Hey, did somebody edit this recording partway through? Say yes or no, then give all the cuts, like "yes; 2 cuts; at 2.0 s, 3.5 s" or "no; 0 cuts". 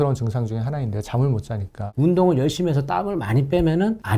yes; 1 cut; at 1.8 s